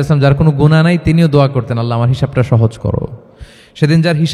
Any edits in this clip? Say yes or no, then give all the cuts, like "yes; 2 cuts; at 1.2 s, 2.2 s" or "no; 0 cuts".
no; 0 cuts